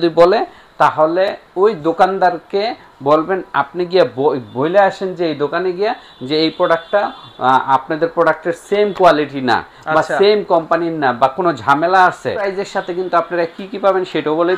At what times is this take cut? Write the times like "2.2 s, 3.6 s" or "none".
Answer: 12.6 s